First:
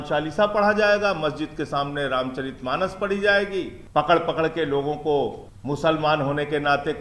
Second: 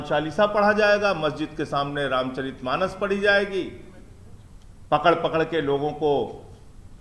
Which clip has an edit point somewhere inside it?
first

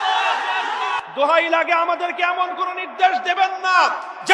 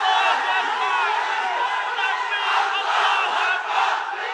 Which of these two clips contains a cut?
first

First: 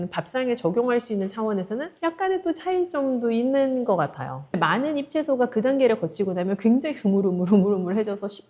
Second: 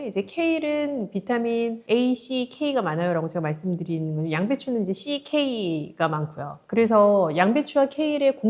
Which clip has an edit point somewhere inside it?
first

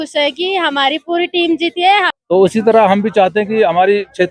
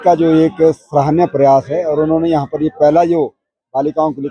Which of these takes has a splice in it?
first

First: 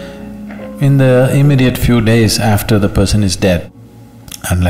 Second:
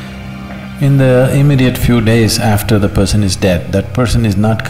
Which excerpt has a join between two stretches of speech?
first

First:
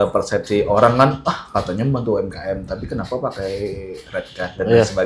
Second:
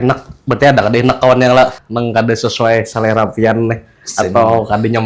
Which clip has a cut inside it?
second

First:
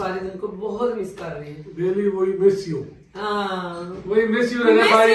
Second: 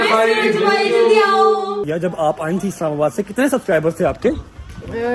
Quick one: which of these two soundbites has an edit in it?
second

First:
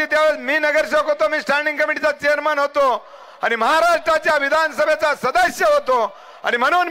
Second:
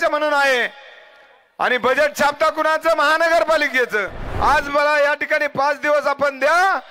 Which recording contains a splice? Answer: second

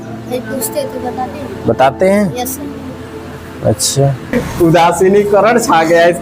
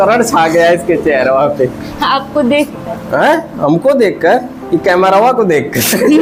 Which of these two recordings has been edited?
first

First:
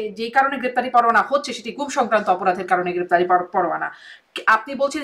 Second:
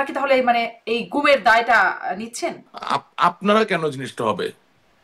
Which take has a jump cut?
second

